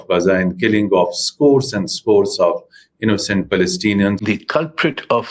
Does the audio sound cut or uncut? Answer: cut